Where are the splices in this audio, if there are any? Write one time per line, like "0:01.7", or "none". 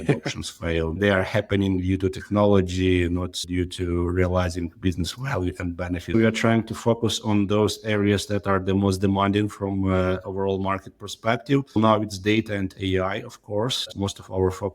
0:01.0
0:06.1
0:11.8
0:14.0

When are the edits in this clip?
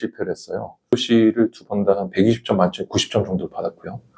0:00.9

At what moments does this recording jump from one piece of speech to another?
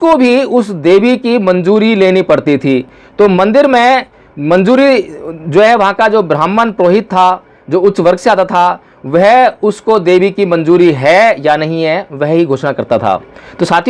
none

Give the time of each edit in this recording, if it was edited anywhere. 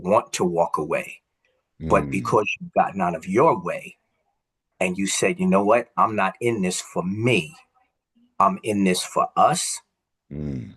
none

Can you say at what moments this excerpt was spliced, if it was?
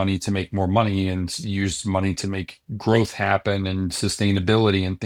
none

